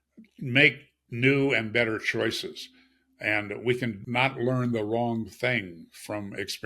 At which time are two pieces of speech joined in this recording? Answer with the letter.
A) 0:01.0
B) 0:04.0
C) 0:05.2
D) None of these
B